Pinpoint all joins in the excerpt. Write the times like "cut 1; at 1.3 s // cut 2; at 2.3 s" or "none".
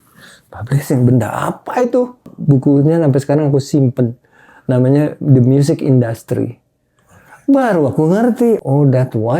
cut 1; at 2.3 s // cut 2; at 8.6 s